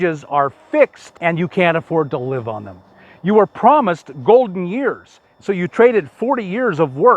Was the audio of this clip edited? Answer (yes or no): yes